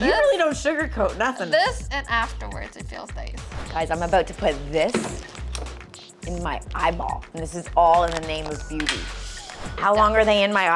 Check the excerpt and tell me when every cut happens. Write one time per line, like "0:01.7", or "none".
0:03.4
0:07.3
0:09.7